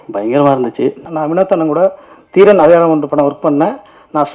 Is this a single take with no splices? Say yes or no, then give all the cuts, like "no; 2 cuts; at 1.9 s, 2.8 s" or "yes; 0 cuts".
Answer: no; 1 cut; at 1.1 s